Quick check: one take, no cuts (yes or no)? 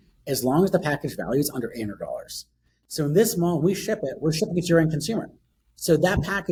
yes